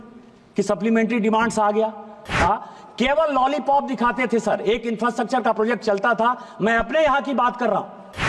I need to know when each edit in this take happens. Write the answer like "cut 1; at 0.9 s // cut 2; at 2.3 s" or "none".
cut 1; at 2.3 s